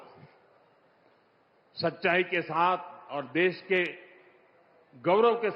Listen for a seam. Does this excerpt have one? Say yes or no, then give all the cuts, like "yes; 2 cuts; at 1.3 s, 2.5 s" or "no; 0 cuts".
no; 0 cuts